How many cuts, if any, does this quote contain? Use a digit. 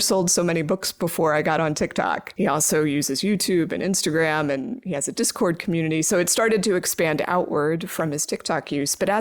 1